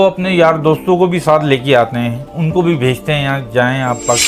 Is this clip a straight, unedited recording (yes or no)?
yes